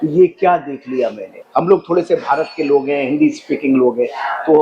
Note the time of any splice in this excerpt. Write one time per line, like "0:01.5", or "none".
0:01.4